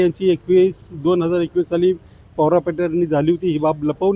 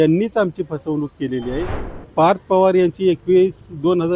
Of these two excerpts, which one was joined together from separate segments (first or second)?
second